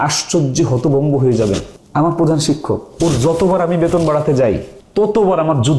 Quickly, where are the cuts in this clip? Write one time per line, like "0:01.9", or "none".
0:01.8
0:04.8